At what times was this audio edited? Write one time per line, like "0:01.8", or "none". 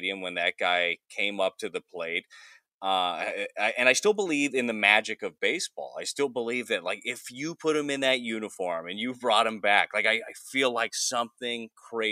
none